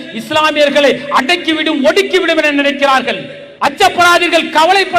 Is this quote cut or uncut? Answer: uncut